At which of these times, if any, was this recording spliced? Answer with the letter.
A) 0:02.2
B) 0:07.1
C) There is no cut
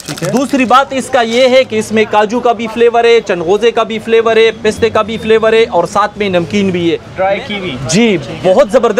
B